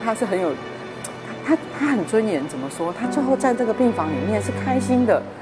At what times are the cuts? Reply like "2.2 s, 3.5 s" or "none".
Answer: none